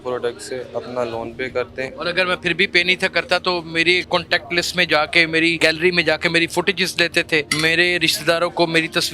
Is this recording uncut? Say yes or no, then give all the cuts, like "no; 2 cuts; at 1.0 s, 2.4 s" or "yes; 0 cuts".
no; 4 cuts; at 1.9 s, 4.0 s, 5.6 s, 7.5 s